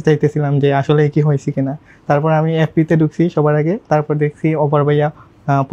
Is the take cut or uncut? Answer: uncut